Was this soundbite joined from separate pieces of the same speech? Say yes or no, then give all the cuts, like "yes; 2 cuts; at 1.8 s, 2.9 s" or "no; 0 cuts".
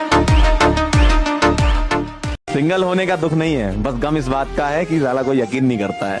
no; 0 cuts